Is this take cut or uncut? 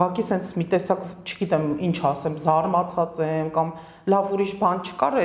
uncut